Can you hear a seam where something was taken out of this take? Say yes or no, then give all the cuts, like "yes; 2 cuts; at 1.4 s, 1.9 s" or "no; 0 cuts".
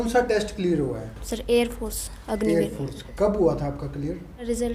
no; 0 cuts